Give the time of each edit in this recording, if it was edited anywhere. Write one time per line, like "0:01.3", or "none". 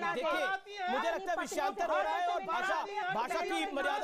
none